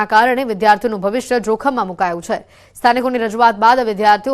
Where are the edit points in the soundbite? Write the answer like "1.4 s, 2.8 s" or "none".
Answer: 1.3 s